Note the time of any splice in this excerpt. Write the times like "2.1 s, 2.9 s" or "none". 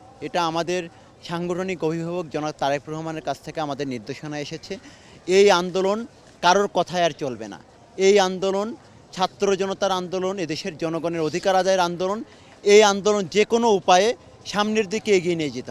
none